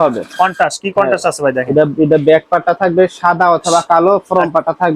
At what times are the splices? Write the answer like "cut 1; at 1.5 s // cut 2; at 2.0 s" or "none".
none